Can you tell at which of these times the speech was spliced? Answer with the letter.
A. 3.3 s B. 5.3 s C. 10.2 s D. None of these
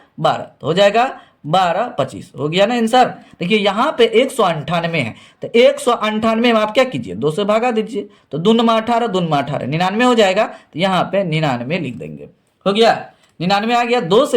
A